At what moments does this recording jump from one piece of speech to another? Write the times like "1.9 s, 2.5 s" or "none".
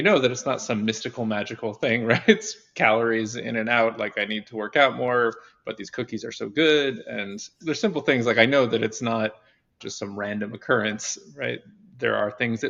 none

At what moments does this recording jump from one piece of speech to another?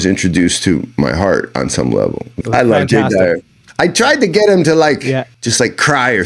2.3 s, 5.3 s

